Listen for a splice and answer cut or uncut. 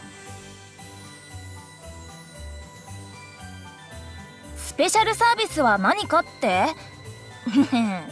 cut